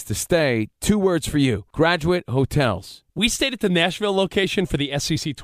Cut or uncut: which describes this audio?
uncut